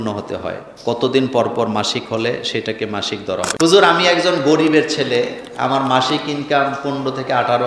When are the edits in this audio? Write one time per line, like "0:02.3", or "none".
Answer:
0:03.5